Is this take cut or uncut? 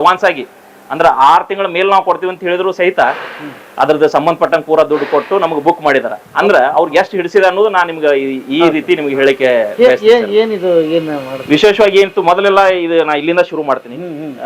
uncut